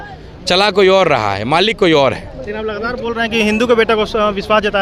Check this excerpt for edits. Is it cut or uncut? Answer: uncut